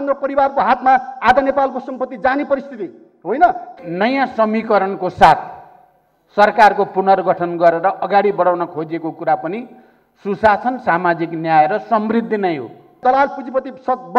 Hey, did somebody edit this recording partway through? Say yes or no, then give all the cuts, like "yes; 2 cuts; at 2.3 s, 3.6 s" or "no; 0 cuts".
yes; 2 cuts; at 3.7 s, 13.0 s